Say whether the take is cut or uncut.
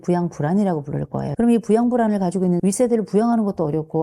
cut